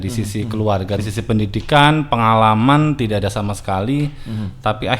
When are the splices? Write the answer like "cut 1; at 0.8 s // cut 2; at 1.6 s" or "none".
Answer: cut 1; at 1.1 s